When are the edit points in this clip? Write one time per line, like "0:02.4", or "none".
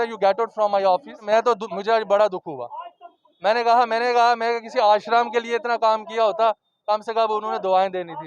0:01.2